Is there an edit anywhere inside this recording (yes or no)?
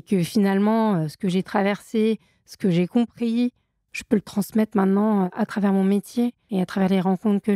yes